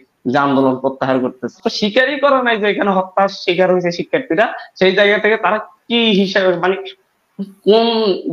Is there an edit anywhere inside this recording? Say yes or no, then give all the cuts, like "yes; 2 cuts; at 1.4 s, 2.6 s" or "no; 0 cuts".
yes; 1 cut; at 1.6 s